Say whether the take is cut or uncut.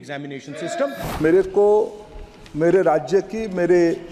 cut